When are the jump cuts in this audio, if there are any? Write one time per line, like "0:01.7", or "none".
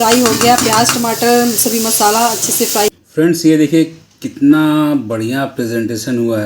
0:02.9